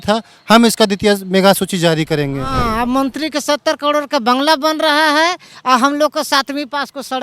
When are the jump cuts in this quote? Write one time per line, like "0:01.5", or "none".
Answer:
0:02.6